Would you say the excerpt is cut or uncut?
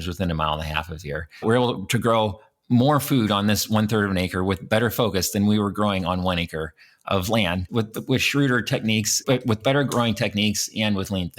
cut